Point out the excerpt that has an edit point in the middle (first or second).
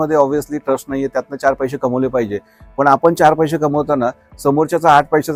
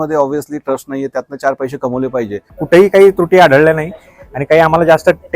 second